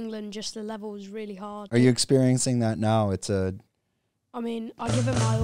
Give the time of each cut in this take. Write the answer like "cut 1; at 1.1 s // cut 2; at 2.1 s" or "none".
cut 1; at 1.7 s